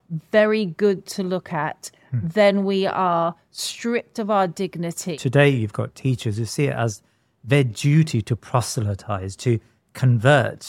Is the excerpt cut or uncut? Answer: cut